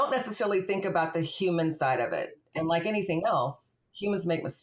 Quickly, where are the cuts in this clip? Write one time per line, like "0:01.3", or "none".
0:02.3